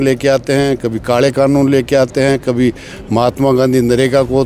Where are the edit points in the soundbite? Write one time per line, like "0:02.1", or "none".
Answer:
none